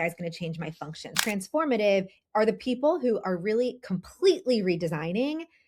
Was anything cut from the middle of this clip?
yes; 1 cut; at 1.2 s

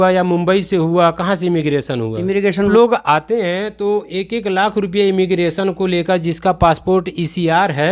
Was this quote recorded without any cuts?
no; 1 cut; at 2.7 s

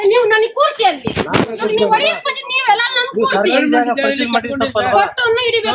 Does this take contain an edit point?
no; 0 cuts

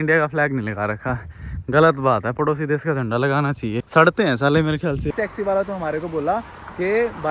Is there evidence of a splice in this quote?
yes; 2 cuts; at 3.8 s, 5.1 s

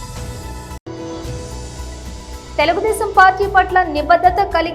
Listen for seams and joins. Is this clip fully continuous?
no; 2 cuts; at 0.8 s, 2.4 s

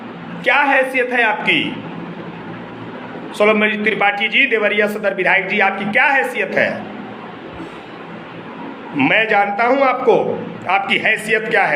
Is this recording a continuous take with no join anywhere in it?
yes; 0 cuts

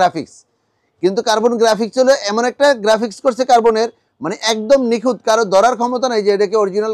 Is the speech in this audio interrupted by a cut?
no; 0 cuts

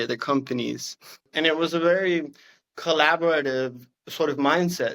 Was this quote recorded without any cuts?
no; 1 cut; at 1.3 s

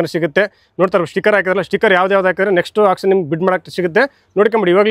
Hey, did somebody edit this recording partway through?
no; 0 cuts

